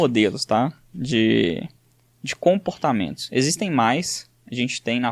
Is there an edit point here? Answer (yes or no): no